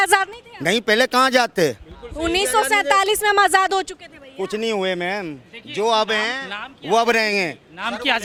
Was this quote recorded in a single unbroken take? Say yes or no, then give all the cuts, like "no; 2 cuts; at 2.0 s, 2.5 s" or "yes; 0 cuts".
yes; 0 cuts